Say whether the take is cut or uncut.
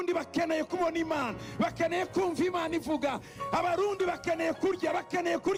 uncut